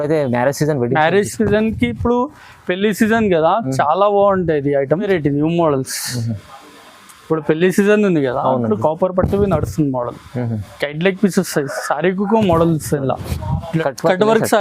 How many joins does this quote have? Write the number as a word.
two